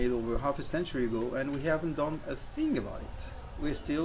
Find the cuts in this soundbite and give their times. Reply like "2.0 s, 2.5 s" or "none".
2.9 s